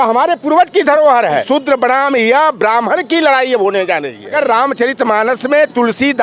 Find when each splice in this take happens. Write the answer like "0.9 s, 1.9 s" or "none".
1.4 s, 4.3 s